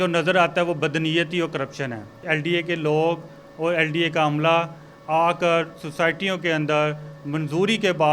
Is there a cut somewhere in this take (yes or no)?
yes